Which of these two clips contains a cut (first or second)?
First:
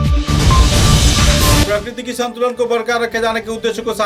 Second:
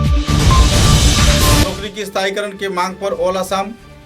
second